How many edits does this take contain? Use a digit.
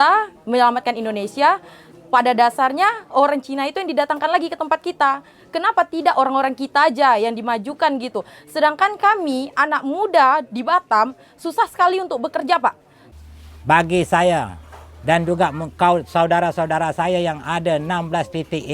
1